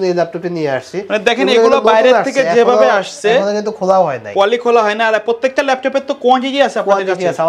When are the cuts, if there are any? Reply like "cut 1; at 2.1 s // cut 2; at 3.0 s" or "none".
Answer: none